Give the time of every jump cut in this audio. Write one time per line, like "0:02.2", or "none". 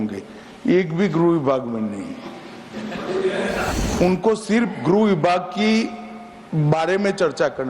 0:03.7